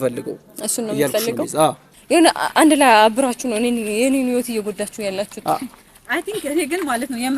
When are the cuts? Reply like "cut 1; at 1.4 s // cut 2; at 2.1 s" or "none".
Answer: cut 1; at 1.9 s

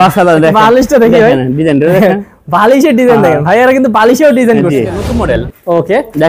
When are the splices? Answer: cut 1; at 5.1 s

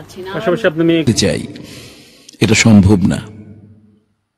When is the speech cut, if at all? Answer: cut 1; at 1.0 s

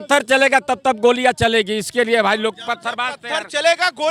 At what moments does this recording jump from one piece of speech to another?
none

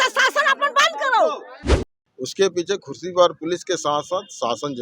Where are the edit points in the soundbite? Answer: cut 1; at 1.8 s

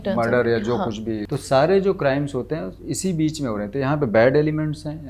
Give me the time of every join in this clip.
cut 1; at 1.2 s

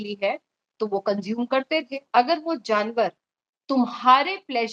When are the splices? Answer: cut 1; at 2.0 s

